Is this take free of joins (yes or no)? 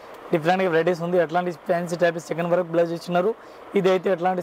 yes